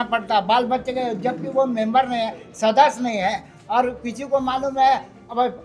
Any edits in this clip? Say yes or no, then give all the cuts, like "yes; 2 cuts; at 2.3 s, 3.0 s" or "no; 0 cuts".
no; 0 cuts